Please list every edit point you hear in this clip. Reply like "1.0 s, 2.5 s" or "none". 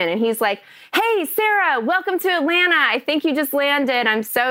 none